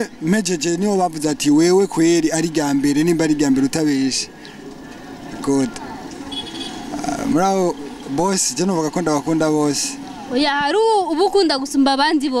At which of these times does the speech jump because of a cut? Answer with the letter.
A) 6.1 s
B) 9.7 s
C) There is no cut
A